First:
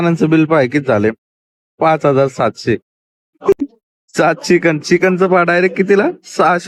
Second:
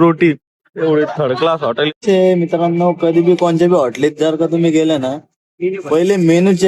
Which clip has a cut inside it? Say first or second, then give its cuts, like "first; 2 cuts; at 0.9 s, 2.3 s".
second; 1 cut; at 1.9 s